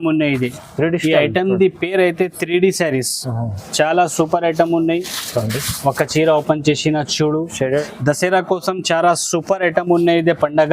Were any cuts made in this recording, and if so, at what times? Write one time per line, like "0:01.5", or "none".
0:07.8